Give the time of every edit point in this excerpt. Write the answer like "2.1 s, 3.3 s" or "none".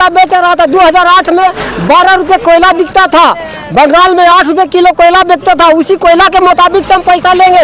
none